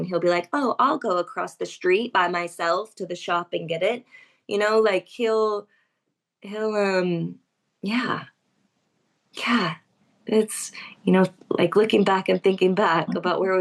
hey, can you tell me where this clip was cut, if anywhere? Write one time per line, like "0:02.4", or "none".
none